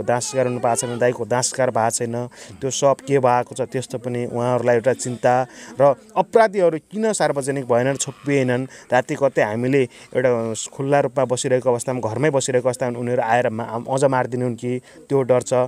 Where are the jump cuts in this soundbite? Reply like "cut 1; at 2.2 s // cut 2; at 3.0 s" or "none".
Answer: none

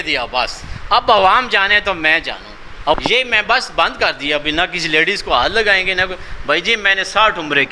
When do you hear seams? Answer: cut 1; at 2.9 s

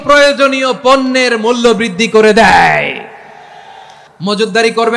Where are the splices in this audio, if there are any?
cut 1; at 4.0 s

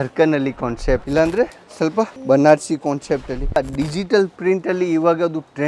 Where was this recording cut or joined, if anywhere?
cut 1; at 1.1 s // cut 2; at 2.2 s // cut 3; at 3.6 s

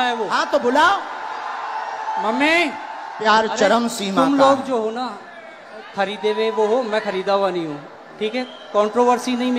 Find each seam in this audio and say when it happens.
cut 1; at 3.2 s

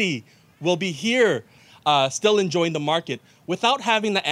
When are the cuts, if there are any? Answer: cut 1; at 1.6 s

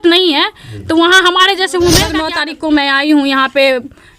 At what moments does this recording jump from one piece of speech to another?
cut 1; at 2.3 s

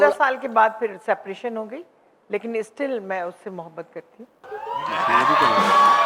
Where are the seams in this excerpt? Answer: none

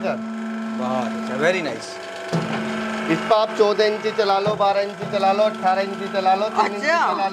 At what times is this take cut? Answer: none

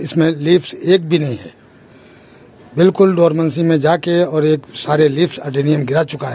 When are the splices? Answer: none

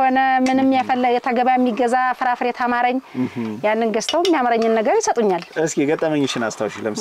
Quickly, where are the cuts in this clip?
cut 1; at 5.5 s

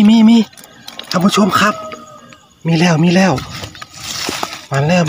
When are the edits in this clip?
none

